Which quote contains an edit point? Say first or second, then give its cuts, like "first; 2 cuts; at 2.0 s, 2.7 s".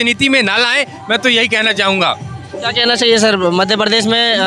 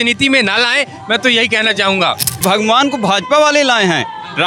second; 1 cut; at 2.3 s